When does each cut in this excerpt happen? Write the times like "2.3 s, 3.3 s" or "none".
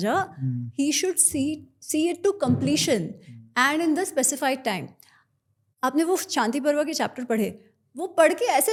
none

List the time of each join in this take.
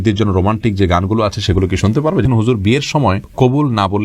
2.2 s

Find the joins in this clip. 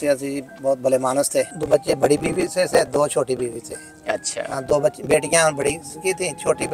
1.6 s

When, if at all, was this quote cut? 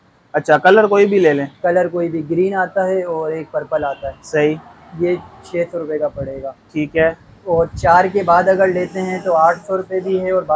none

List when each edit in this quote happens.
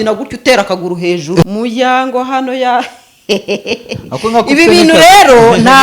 1.4 s

